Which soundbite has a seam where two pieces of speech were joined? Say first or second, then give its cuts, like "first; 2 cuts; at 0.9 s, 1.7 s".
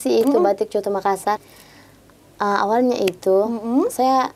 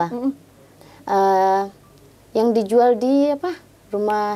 first; 1 cut; at 1.4 s